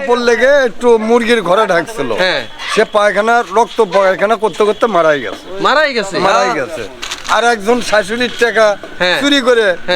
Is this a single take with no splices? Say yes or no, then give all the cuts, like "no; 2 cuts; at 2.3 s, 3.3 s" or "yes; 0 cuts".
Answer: yes; 0 cuts